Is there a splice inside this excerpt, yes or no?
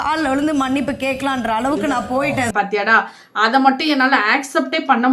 yes